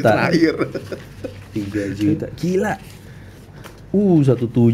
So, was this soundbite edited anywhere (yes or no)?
no